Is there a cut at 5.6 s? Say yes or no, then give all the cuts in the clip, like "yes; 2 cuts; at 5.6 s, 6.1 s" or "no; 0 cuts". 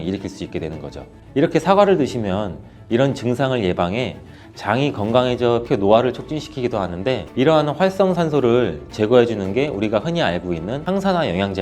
yes; 1 cut; at 5.6 s